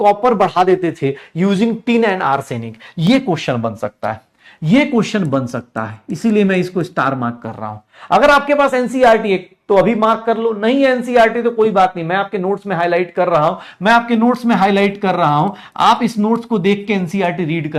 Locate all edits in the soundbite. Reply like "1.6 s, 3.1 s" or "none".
none